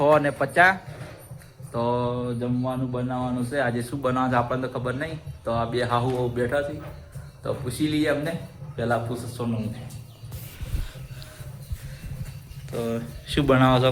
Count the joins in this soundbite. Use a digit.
0